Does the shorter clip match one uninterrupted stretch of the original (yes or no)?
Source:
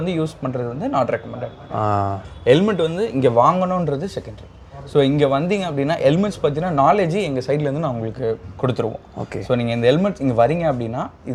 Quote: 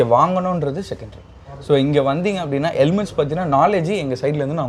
yes